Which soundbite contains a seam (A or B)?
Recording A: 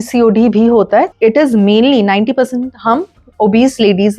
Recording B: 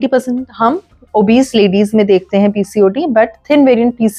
A